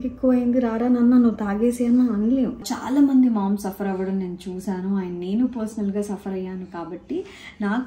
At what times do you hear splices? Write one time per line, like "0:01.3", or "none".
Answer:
0:02.6